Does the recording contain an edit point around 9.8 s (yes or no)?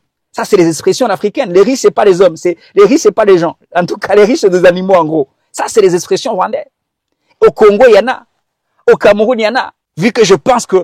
yes